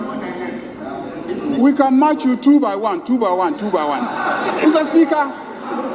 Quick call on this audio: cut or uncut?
cut